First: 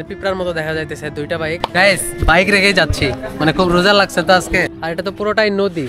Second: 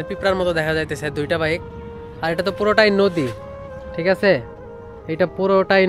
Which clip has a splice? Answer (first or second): first